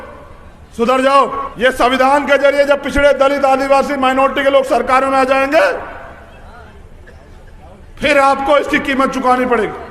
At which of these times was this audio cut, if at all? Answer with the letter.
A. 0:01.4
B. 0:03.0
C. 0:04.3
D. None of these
A